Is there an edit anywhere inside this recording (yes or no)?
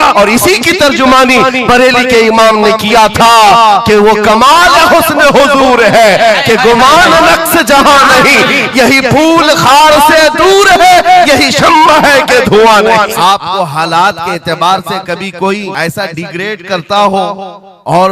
yes